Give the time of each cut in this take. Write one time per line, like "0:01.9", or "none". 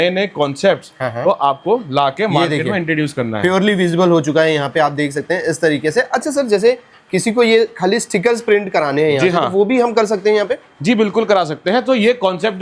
none